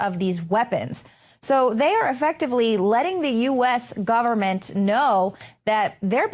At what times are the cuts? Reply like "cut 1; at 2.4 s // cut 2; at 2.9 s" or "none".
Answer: cut 1; at 4.2 s